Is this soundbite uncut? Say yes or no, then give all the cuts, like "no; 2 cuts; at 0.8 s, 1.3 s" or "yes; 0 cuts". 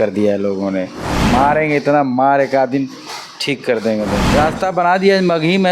no; 2 cuts; at 1.2 s, 4.2 s